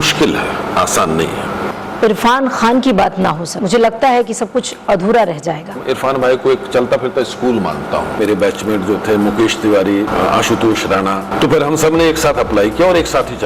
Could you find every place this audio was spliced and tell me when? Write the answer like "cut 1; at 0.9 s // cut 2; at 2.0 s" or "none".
cut 1; at 1.7 s // cut 2; at 3.5 s // cut 3; at 5.8 s // cut 4; at 8.2 s // cut 5; at 10.1 s // cut 6; at 11.3 s